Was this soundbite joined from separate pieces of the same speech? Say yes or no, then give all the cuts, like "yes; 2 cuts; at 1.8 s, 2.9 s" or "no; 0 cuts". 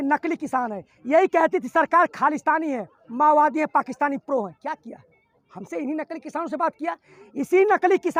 no; 0 cuts